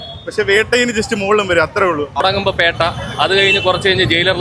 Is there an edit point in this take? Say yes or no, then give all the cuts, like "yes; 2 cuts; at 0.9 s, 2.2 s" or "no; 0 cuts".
yes; 1 cut; at 2.2 s